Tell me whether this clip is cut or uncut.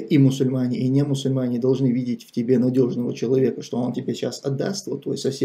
uncut